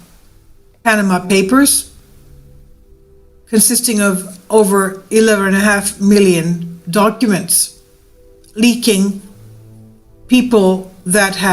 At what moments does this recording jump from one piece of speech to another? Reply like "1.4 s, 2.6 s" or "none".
4.2 s